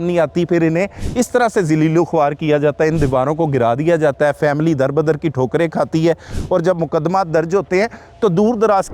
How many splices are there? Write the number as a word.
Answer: zero